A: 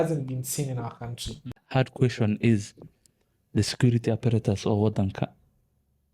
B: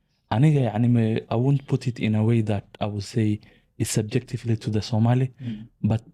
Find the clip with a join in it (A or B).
A